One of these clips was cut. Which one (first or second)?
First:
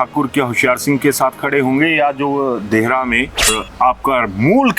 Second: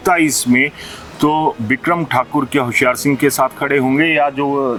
first